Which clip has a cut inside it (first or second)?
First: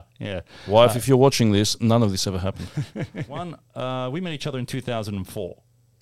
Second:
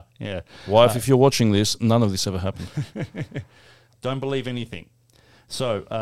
first